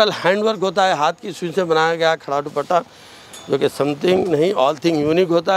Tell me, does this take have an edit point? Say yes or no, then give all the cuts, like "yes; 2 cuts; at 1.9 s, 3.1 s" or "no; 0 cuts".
no; 0 cuts